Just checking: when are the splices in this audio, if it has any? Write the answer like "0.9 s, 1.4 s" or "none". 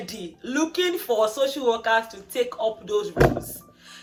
none